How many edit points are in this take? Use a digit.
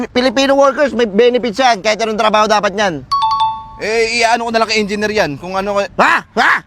0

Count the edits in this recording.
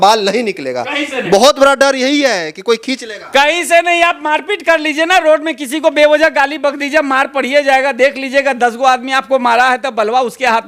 0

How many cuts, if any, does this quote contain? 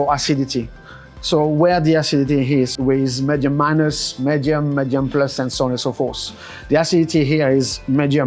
1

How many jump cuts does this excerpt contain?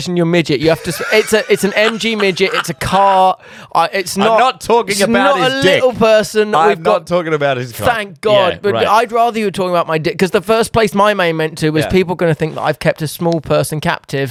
0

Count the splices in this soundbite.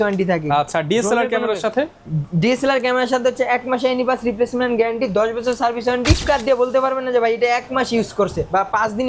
1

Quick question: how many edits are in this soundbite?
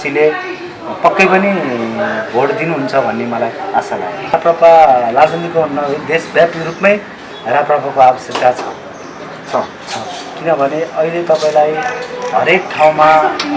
1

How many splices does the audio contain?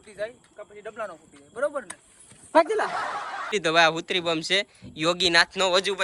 1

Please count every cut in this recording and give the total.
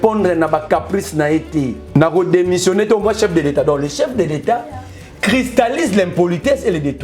1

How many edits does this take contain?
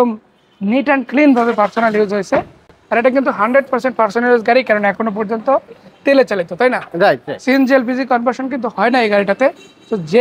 0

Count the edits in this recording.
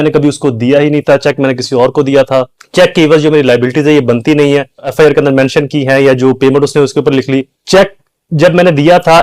3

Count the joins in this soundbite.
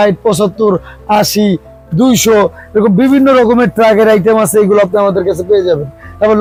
0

